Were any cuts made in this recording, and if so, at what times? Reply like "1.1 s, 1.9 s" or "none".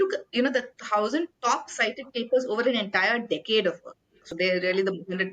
4.3 s